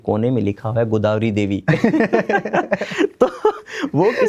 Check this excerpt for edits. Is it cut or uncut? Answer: uncut